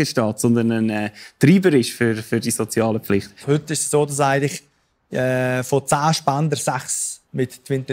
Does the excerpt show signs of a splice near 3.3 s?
yes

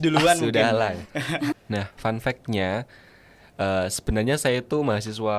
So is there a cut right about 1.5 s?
yes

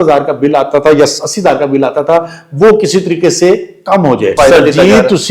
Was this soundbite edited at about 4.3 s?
yes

